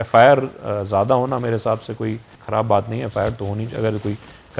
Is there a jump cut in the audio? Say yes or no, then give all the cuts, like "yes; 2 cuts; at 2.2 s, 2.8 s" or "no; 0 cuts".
yes; 1 cut; at 2.4 s